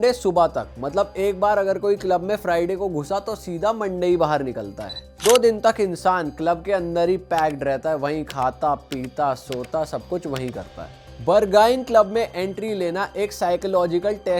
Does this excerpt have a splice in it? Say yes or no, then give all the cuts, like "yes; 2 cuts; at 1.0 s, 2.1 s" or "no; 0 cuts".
no; 0 cuts